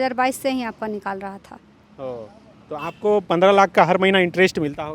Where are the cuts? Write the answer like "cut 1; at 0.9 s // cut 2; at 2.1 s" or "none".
none